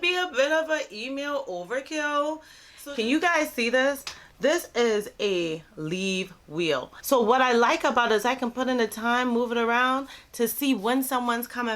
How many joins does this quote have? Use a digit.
2